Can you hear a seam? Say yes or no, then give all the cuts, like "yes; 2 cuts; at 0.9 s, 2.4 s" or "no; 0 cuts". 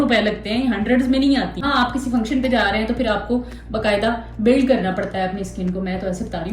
yes; 1 cut; at 1.6 s